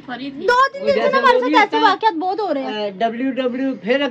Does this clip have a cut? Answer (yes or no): no